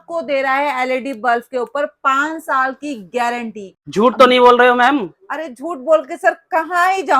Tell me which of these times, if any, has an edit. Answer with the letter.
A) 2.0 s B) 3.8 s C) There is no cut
B